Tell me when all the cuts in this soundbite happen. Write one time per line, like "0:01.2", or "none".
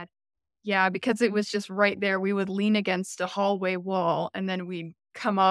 none